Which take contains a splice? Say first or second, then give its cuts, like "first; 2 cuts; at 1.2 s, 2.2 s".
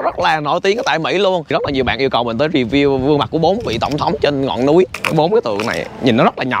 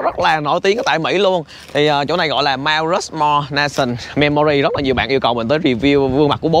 first; 2 cuts; at 1.5 s, 5.0 s